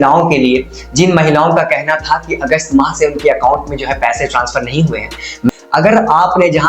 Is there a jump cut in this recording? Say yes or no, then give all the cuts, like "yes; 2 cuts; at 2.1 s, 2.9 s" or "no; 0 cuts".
yes; 1 cut; at 5.5 s